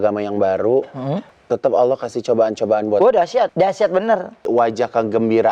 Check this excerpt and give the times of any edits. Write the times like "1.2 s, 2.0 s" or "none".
1.3 s, 3.5 s, 4.5 s